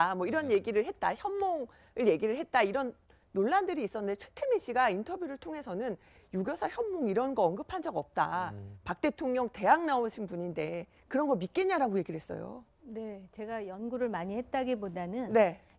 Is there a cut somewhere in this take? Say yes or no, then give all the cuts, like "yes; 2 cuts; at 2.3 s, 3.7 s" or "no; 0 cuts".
no; 0 cuts